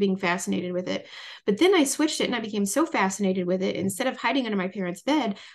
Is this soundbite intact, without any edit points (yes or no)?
yes